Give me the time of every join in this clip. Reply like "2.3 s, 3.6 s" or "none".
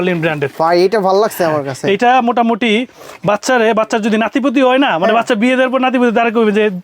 none